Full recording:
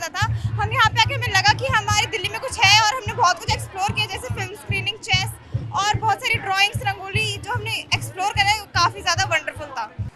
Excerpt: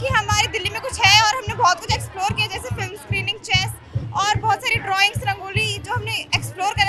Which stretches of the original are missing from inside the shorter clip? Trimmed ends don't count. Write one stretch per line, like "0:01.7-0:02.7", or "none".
none